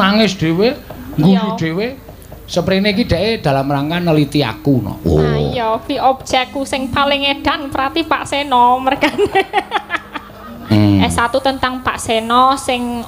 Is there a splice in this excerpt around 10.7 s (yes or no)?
yes